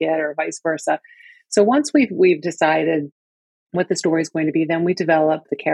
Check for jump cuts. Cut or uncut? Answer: uncut